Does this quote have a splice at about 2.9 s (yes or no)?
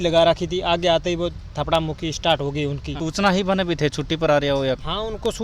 yes